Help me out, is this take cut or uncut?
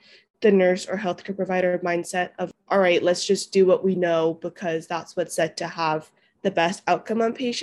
cut